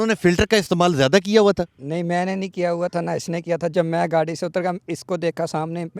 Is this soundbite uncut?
yes; 0 cuts

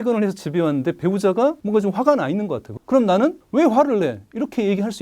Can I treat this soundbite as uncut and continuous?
no; 3 cuts; at 1.6 s, 2.7 s, 3.4 s

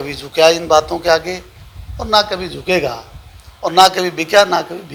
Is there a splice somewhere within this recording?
no; 0 cuts

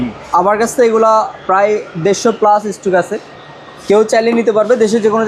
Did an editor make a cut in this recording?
no; 0 cuts

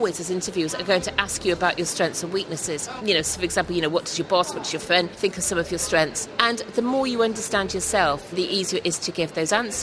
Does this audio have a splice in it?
yes; 4 cuts; at 2.9 s, 5.1 s, 6.2 s, 8.3 s

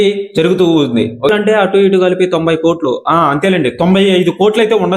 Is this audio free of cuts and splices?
no; 1 cut; at 1.3 s

